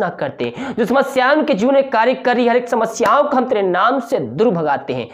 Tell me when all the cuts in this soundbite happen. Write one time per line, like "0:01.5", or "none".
none

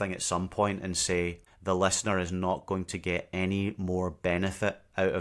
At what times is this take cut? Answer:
0:01.5

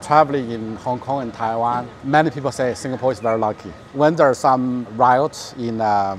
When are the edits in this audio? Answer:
0:01.9
0:03.8
0:04.9

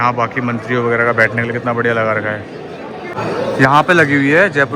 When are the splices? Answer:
0:03.2

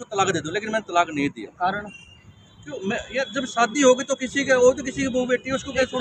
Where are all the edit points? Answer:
none

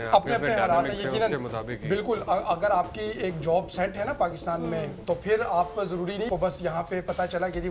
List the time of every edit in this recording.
0:06.3

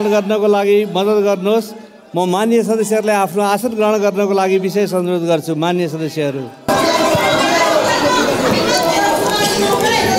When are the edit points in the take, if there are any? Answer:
none

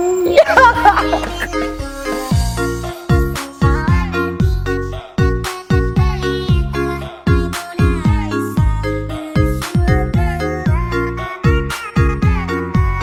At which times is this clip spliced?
none

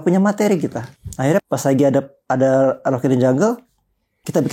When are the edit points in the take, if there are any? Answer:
0:01.0

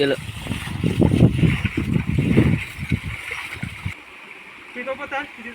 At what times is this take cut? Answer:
0:03.9

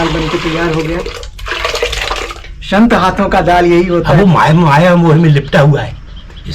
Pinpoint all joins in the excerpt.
0:04.1

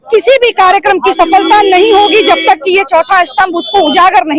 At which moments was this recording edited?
0:01.2

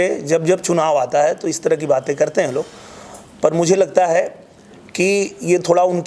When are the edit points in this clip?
none

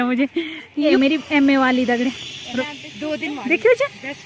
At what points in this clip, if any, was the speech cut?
0:01.0
0:02.6

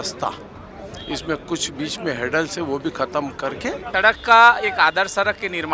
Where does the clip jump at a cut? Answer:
0:03.9

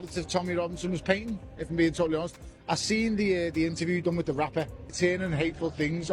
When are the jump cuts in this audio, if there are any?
0:04.9

